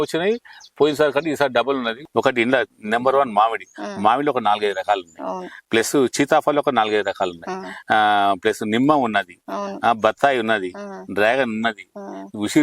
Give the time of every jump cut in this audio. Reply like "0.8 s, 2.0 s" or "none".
2.0 s